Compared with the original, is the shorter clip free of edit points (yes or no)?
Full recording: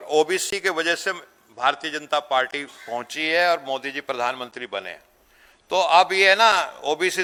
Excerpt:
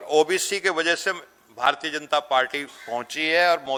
yes